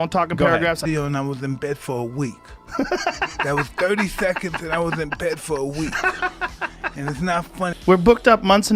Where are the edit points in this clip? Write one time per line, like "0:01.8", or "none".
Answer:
0:00.8
0:07.7